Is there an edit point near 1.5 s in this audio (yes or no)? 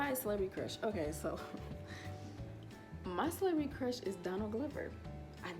no